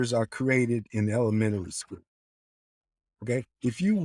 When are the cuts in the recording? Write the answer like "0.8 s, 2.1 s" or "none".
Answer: none